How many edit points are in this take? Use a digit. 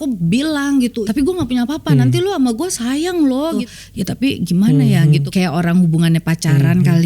3